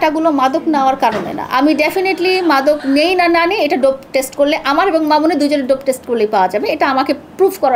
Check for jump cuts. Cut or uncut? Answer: uncut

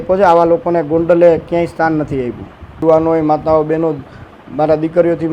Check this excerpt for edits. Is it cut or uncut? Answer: cut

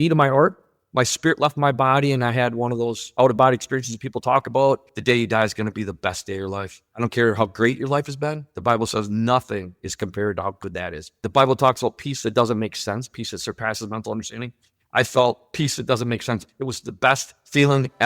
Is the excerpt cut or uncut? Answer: cut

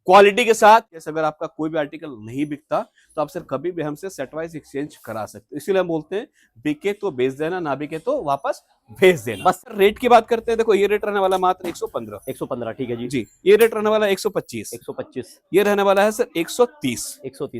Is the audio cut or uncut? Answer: cut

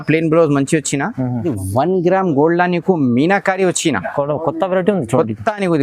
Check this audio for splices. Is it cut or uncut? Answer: cut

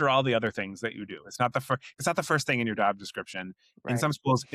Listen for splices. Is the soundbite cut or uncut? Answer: uncut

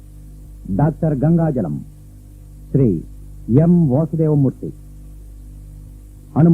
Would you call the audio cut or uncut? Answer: uncut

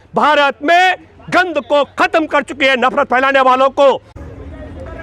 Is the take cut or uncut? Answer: cut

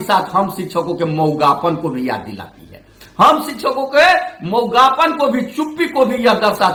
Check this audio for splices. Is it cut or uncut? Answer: uncut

